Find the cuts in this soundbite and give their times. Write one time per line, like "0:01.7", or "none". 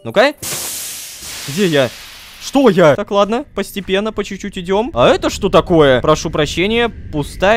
0:01.0
0:03.0
0:04.9